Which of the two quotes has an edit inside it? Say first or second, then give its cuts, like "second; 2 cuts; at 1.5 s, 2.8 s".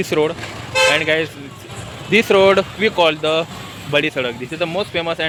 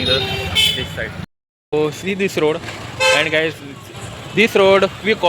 second; 1 cut; at 1.2 s